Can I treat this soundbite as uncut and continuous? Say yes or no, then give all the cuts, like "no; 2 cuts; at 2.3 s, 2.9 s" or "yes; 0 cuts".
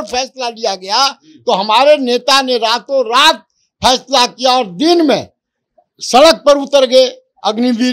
yes; 0 cuts